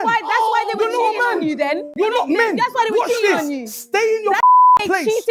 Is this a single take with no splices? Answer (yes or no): yes